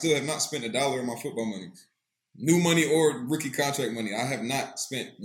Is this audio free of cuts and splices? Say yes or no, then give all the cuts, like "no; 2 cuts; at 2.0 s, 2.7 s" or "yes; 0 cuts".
yes; 0 cuts